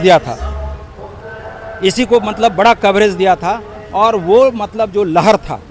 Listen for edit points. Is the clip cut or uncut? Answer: uncut